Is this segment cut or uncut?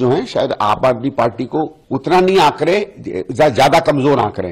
cut